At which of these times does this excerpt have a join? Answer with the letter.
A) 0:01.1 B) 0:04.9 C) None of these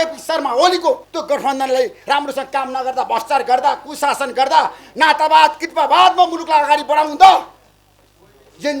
A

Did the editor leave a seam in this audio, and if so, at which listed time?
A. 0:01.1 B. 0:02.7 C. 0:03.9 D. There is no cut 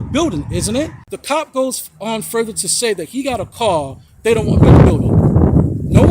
A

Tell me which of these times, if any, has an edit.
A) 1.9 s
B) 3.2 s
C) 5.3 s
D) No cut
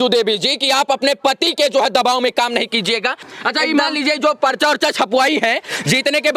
B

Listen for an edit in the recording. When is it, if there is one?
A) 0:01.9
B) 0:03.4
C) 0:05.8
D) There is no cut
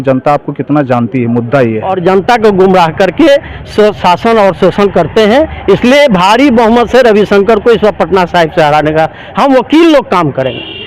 A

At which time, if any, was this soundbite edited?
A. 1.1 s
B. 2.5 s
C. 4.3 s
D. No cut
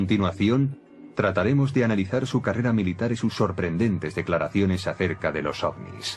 B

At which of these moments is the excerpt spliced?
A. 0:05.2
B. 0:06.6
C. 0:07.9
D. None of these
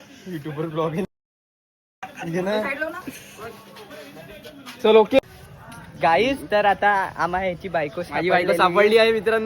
A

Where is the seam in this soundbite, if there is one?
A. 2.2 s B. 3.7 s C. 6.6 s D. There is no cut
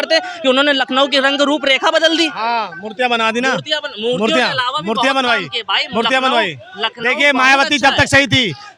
D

